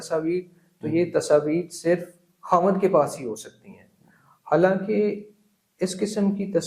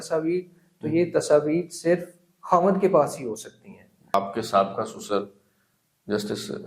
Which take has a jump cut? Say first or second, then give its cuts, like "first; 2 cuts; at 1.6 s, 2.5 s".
second; 1 cut; at 4.1 s